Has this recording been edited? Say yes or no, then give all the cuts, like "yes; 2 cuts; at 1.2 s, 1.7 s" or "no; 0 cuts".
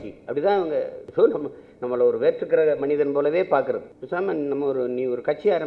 yes; 2 cuts; at 1.0 s, 3.9 s